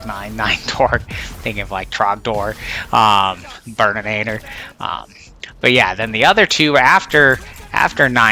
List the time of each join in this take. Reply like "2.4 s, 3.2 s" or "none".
none